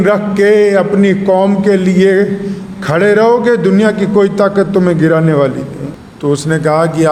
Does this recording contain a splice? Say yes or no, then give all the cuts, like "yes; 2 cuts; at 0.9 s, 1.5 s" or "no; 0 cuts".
no; 0 cuts